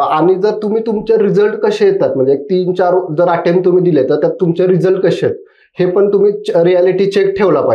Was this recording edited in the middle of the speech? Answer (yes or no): no